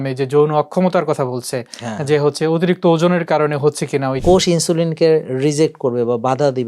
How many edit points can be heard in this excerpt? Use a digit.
1